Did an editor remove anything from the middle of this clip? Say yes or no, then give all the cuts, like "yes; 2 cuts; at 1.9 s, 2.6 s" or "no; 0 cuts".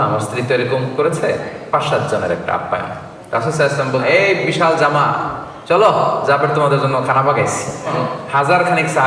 yes; 2 cuts; at 4.0 s, 7.9 s